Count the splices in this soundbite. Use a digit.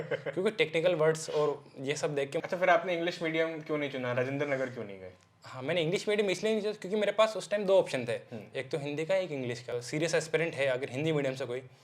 2